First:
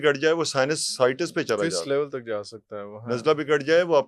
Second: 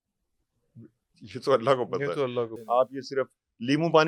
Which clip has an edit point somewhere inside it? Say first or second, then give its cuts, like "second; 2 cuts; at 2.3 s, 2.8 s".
second; 1 cut; at 2.6 s